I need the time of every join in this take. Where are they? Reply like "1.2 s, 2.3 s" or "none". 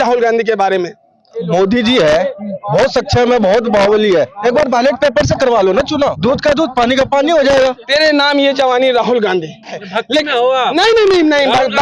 1.4 s, 6.2 s, 7.8 s, 9.8 s